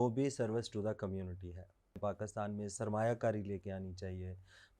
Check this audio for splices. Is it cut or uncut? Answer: cut